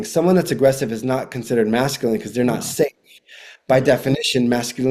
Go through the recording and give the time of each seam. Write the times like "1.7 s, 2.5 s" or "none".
none